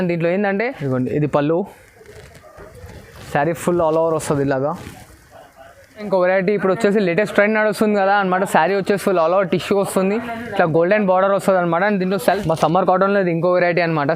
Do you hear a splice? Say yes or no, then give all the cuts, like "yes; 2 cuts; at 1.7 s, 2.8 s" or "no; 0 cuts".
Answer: yes; 3 cuts; at 0.8 s, 6.1 s, 12.2 s